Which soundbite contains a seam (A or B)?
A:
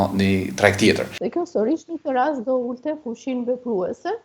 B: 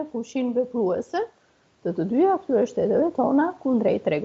A